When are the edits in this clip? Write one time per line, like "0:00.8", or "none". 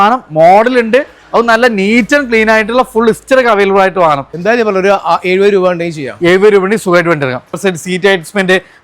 0:04.3
0:07.6